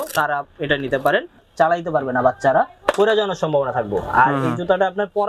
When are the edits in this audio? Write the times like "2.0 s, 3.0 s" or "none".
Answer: 1.4 s